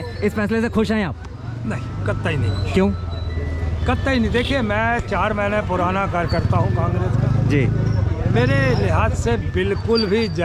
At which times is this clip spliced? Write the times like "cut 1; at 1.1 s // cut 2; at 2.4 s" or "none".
none